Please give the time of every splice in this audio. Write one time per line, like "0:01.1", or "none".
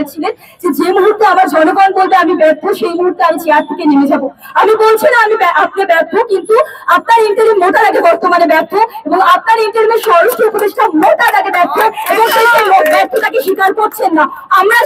none